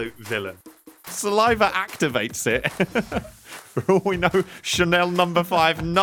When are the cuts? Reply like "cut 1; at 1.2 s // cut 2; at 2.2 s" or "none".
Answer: cut 1; at 1.1 s